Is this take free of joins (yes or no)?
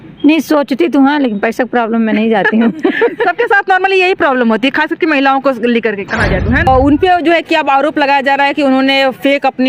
no